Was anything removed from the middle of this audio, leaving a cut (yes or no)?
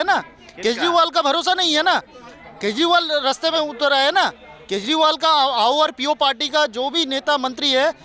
no